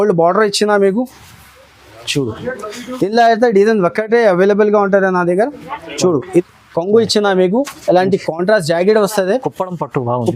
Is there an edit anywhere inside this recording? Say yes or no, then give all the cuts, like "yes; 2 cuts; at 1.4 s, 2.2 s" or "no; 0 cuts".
yes; 1 cut; at 6.5 s